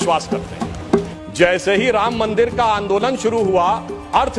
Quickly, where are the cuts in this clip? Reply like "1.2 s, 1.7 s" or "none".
1.1 s